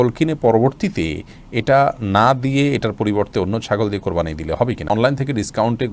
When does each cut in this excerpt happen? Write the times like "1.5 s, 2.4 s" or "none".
4.9 s